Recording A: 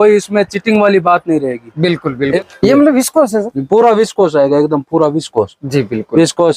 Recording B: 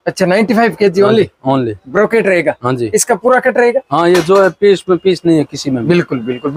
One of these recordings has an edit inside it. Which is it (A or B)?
A